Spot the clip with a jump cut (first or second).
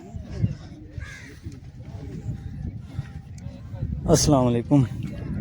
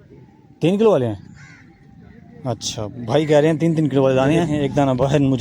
second